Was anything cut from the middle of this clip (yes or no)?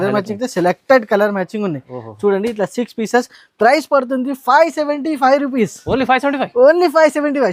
no